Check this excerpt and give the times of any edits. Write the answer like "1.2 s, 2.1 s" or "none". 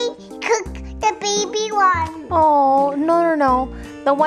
none